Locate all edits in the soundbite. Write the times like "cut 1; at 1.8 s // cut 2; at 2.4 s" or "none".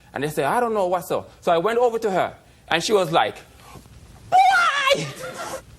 cut 1; at 1.3 s